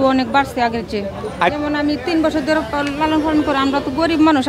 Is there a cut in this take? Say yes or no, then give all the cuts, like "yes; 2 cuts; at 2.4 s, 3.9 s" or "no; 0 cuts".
yes; 1 cut; at 1.5 s